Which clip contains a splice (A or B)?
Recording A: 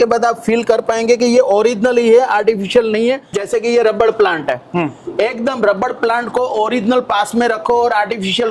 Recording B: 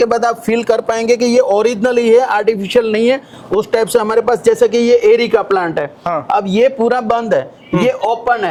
A